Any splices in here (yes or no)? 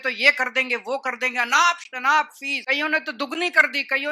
yes